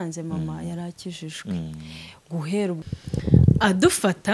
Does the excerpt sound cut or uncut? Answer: cut